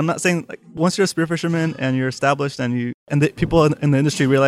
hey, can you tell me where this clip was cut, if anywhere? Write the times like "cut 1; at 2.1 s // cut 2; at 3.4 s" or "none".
cut 1; at 3.1 s